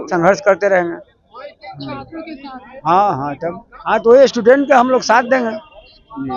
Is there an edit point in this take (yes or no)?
no